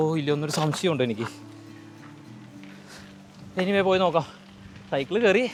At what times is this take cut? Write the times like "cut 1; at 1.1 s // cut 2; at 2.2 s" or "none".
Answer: none